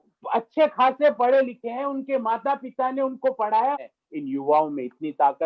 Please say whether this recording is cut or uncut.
cut